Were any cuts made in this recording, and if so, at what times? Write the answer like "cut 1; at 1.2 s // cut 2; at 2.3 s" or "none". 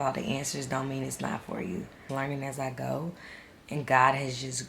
cut 1; at 2.0 s